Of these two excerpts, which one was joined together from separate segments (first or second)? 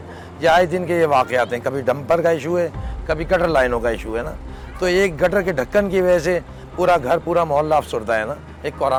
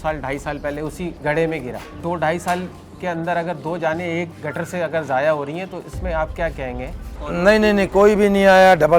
second